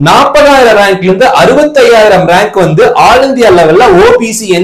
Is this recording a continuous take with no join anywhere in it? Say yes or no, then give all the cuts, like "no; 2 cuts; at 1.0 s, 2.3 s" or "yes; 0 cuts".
yes; 0 cuts